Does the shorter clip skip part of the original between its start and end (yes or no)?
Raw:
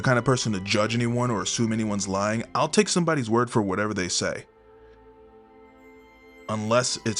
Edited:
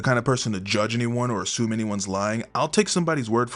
no